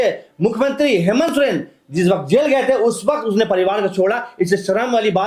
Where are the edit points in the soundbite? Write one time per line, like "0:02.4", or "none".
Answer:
none